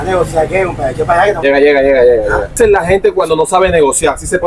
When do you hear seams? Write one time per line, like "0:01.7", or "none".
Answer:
0:01.4